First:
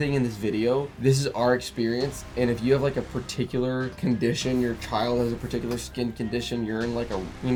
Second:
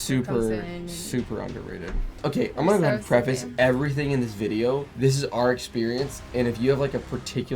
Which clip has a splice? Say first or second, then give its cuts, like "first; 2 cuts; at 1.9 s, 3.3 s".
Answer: second; 1 cut; at 2.2 s